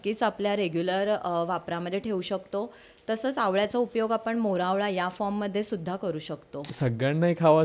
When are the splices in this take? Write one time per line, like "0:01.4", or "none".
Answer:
0:06.7